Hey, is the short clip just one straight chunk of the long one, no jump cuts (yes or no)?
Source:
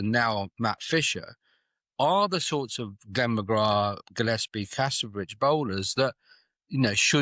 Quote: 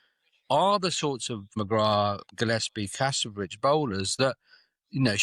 no